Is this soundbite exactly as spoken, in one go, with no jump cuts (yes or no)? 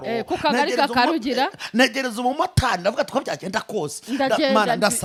yes